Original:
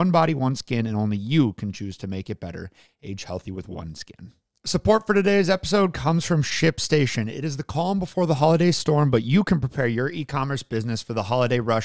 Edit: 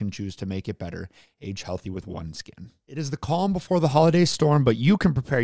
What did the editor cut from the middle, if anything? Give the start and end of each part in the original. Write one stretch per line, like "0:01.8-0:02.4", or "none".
0:04.5-0:07.4